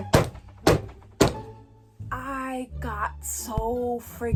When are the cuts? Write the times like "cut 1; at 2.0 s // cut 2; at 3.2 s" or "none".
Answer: none